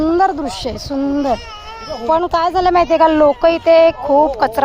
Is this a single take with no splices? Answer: yes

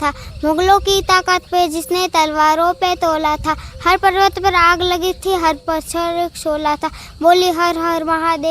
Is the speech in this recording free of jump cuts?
yes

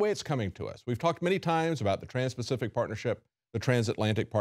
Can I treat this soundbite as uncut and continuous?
yes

